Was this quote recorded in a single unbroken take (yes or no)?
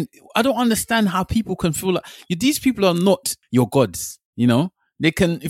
no